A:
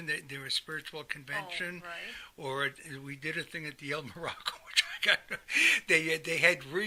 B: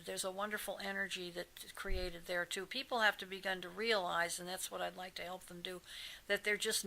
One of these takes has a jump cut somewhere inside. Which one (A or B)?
B